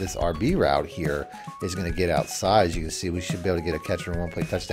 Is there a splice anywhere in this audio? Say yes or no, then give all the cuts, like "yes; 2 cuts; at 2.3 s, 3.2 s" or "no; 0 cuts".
no; 0 cuts